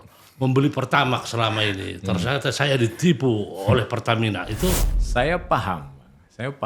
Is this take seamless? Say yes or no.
no